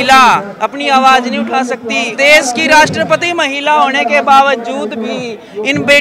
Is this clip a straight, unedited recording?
no; 1 cut; at 2.1 s

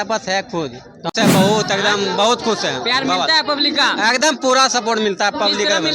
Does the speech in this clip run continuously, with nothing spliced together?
no; 1 cut; at 1.1 s

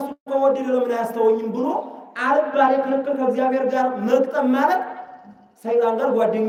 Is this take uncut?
yes; 0 cuts

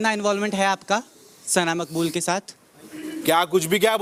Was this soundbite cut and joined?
no; 0 cuts

